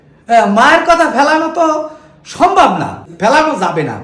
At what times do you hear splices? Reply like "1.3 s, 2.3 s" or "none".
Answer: 3.0 s